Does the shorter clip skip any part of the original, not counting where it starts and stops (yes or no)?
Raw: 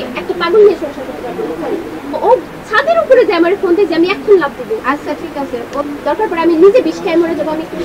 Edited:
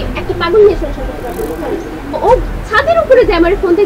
no